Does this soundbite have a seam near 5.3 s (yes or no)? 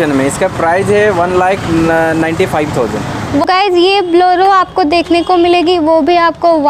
no